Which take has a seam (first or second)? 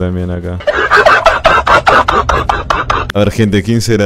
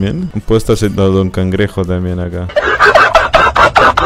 first